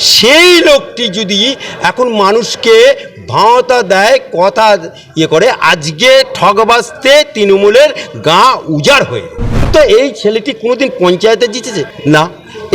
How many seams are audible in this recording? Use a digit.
2